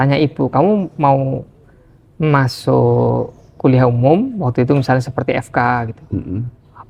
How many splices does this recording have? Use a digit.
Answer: 0